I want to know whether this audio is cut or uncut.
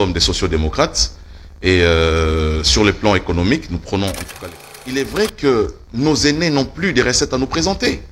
cut